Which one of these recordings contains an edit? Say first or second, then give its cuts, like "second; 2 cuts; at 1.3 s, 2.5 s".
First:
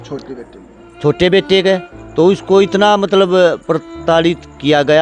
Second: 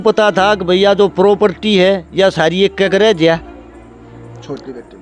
first; 1 cut; at 2.0 s